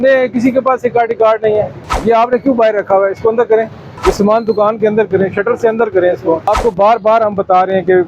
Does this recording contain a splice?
yes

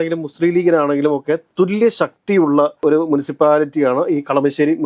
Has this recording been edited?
no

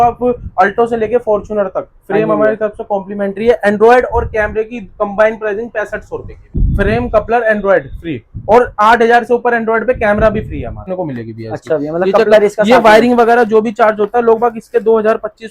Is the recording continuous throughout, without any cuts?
no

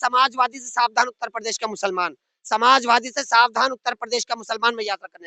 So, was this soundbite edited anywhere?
no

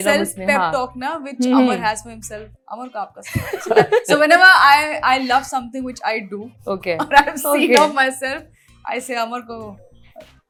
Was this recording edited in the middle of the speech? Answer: no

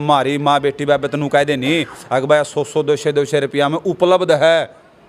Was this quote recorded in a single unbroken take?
yes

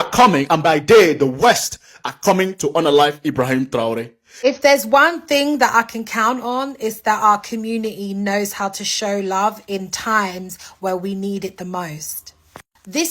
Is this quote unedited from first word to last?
no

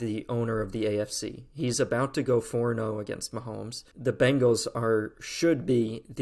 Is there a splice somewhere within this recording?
yes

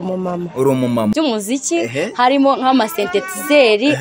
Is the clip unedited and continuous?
no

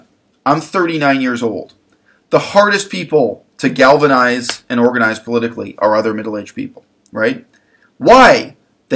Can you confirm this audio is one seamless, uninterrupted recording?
yes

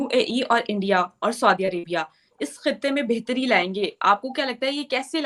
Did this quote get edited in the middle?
no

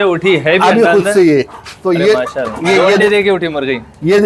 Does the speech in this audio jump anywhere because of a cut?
no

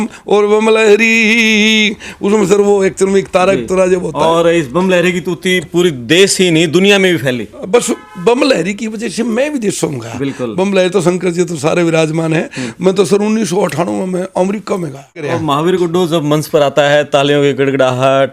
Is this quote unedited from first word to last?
no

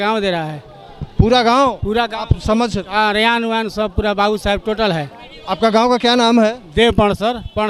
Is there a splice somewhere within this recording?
no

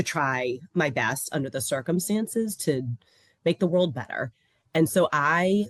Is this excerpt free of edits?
yes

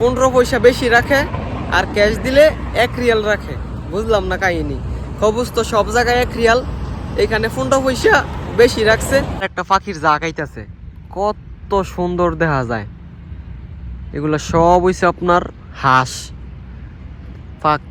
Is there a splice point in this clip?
yes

